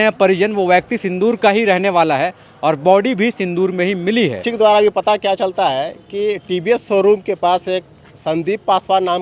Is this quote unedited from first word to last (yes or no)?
no